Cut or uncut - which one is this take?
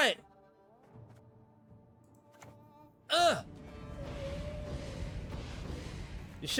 uncut